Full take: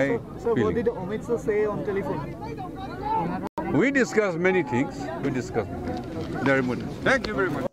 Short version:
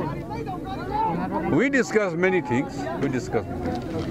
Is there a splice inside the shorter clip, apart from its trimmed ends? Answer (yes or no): yes